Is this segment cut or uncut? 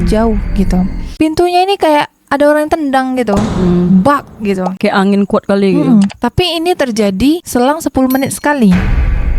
uncut